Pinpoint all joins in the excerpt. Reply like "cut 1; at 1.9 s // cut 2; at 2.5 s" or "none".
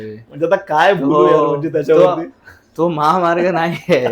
none